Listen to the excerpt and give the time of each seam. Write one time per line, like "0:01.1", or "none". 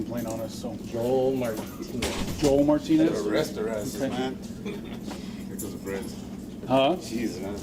none